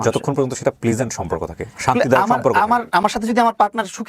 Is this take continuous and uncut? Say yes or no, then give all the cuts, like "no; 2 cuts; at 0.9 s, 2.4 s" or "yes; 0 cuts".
yes; 0 cuts